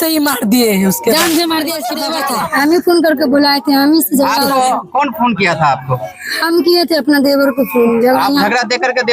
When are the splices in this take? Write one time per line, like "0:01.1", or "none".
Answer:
0:01.9